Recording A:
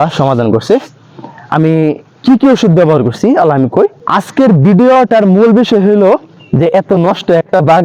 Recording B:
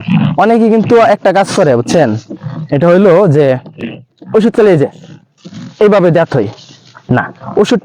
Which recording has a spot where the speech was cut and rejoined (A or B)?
A